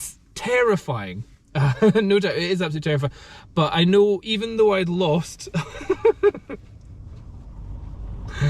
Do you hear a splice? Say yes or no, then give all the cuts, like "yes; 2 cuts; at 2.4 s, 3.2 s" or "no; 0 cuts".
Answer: no; 0 cuts